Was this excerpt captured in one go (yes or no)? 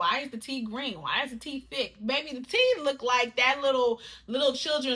yes